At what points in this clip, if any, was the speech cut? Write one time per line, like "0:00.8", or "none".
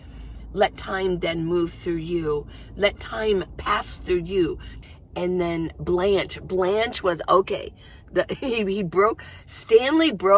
0:04.7